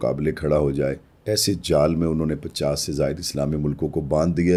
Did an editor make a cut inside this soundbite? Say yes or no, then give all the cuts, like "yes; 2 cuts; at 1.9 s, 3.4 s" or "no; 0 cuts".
no; 0 cuts